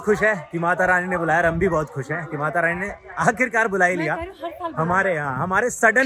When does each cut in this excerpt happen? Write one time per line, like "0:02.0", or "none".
none